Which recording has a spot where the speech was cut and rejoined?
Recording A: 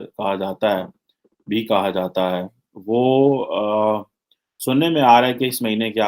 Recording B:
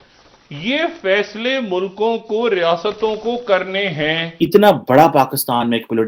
B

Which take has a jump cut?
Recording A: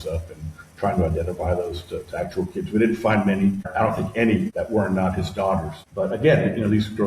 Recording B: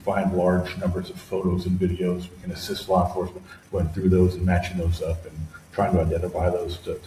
A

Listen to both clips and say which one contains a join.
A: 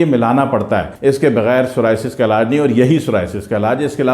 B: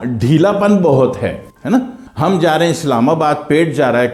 A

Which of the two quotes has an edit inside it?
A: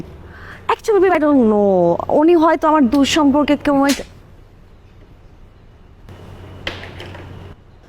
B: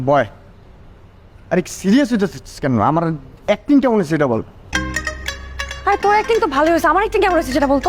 A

